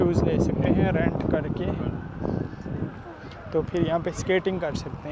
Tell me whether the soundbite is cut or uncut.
uncut